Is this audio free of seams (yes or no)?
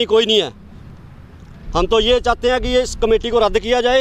yes